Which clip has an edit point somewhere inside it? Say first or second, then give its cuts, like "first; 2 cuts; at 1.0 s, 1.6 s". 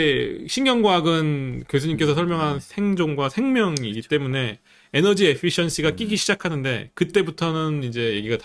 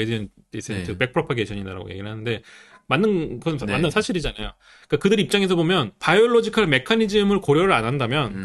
second; 1 cut; at 6.0 s